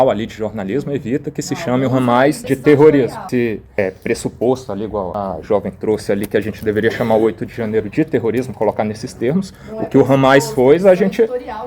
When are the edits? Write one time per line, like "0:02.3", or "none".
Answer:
0:02.4
0:03.2
0:05.1